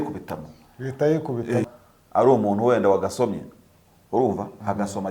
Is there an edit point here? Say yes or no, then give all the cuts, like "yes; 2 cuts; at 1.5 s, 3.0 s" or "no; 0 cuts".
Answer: yes; 1 cut; at 1.7 s